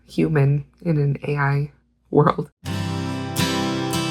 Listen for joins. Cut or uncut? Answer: cut